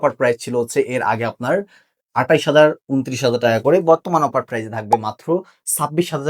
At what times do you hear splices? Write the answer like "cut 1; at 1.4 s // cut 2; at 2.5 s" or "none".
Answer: none